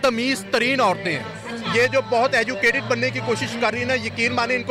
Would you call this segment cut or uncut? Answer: uncut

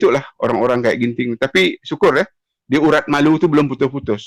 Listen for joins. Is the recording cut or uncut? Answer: uncut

